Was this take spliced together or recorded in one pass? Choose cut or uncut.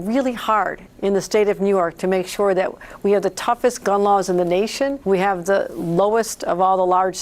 cut